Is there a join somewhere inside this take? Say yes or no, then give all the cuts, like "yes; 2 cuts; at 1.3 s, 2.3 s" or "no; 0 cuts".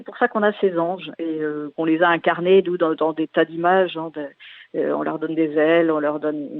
yes; 1 cut; at 1.7 s